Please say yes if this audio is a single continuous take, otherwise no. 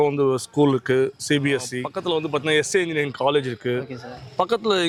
yes